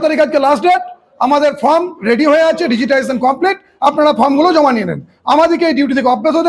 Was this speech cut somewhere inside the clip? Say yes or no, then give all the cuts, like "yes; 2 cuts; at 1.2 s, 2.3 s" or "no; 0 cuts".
no; 0 cuts